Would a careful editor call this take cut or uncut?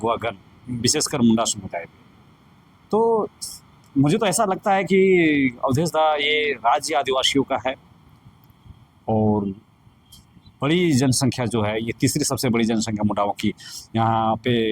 uncut